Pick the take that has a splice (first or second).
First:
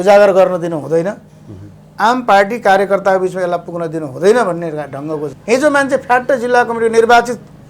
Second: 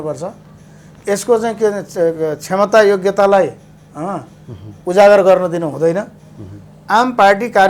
first